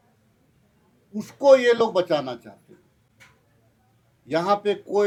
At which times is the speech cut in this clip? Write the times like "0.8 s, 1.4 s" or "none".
none